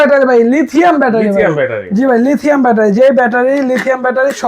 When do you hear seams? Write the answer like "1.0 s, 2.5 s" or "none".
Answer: none